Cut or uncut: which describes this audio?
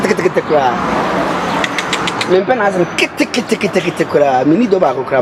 uncut